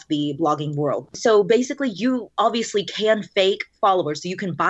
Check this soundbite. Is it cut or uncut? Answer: cut